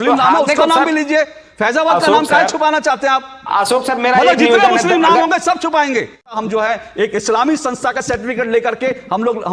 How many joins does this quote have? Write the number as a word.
one